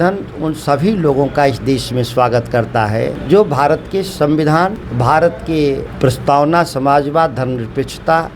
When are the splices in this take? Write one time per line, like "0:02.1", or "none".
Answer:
0:03.2
0:04.8
0:05.9